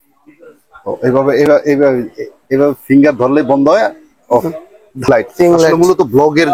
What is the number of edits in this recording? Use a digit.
1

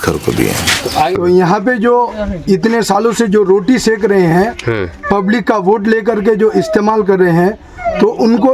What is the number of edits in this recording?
1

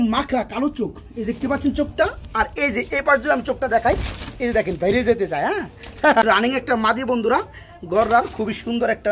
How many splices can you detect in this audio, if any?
1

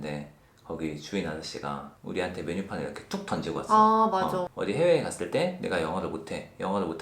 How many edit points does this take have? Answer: 1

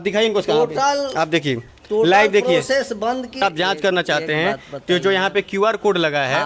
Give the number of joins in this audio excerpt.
1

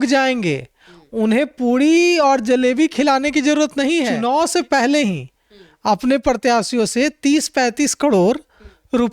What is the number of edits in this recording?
1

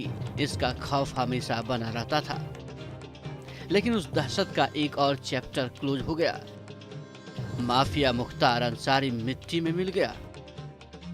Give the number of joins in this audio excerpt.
3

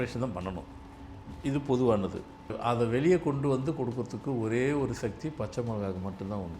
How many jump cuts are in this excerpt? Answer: 1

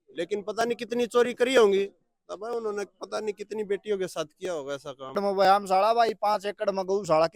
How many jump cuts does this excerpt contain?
1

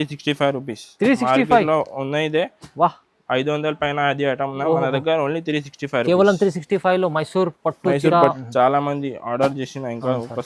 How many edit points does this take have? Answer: 1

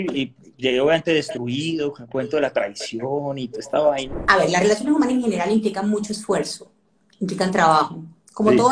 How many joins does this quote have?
1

